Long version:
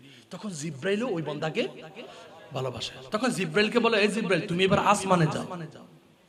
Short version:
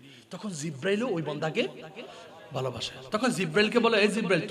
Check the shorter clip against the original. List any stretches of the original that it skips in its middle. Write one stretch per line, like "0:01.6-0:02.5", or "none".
none

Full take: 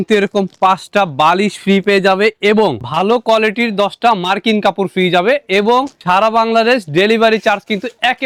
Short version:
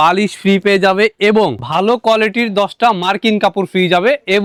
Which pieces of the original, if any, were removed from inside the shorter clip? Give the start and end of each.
none

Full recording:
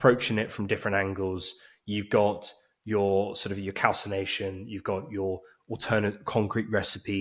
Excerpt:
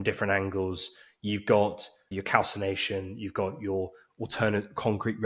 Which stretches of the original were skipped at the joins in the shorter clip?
0:02.7-0:03.5

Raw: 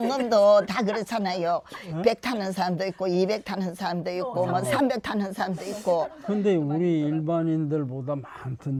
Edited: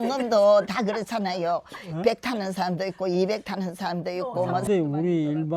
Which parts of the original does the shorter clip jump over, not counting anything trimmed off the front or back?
0:04.7-0:06.4

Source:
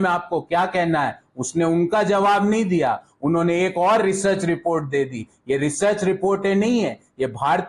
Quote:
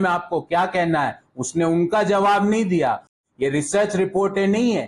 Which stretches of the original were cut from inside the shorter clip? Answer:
0:03.1-0:05.2

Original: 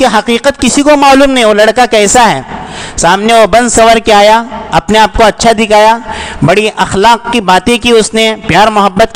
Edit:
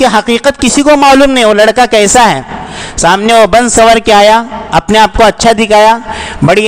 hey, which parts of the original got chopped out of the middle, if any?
none

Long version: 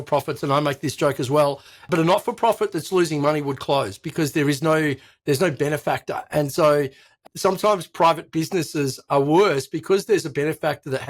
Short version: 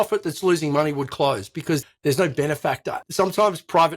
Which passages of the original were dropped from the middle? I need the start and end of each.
0:04.3-0:05.0
0:06.2-0:07.2

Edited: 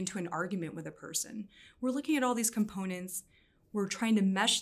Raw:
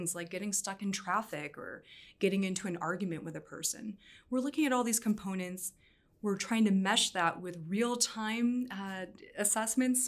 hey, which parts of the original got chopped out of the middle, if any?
none

